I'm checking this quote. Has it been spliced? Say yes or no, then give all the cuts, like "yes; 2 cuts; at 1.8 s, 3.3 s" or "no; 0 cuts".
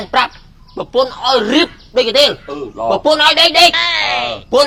no; 0 cuts